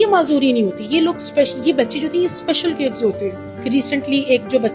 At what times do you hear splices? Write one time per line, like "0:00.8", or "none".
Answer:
0:03.5